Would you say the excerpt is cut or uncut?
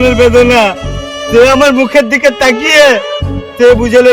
uncut